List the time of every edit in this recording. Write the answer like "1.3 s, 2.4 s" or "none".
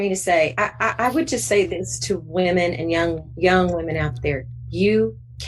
none

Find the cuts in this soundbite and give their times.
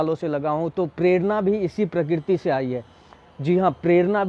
none

